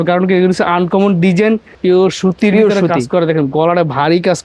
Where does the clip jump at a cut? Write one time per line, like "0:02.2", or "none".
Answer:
0:01.7

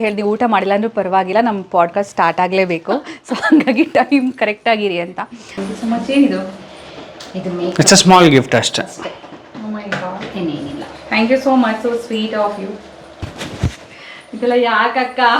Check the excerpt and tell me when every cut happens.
0:05.6

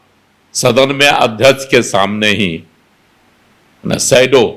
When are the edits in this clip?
none

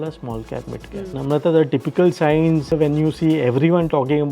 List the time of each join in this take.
0:01.1
0:02.7

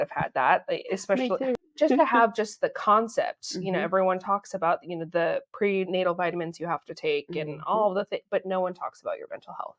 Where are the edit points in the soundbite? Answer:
0:01.5

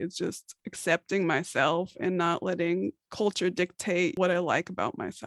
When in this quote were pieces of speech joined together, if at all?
0:04.2

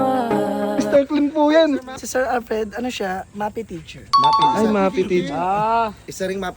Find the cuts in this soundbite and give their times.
0:01.9

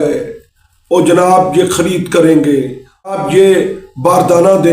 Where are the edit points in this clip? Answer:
0:03.2

